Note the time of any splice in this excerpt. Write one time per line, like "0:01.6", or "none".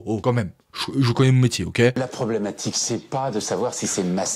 0:01.9

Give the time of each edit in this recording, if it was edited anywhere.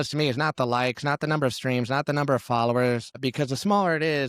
0:03.2

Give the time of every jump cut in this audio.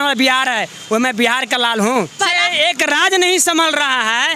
0:02.1

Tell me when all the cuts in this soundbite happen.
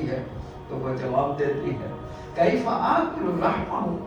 none

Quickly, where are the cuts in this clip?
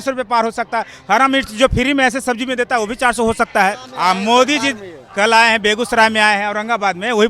0:03.9

